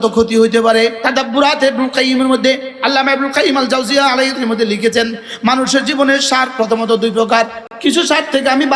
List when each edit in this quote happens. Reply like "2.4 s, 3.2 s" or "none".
1.0 s, 4.3 s, 7.6 s